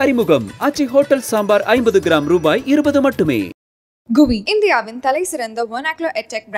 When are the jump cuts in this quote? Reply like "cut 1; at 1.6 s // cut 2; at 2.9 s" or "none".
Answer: none